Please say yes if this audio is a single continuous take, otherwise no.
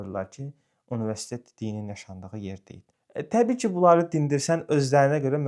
yes